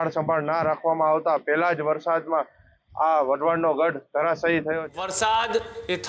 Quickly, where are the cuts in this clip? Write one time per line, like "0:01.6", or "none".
0:04.8